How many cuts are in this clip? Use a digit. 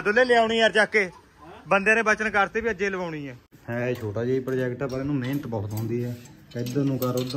1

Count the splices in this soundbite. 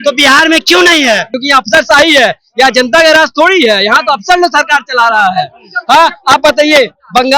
1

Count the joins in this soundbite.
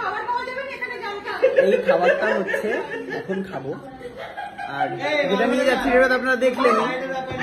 0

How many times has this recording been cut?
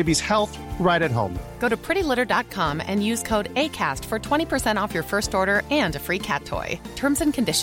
0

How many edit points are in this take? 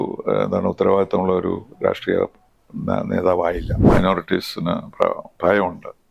1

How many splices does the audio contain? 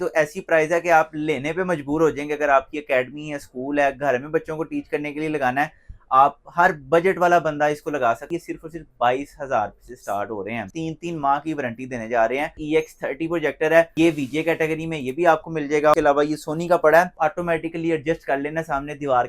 6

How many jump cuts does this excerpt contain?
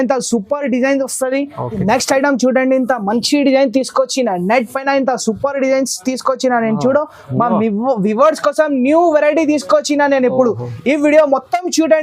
1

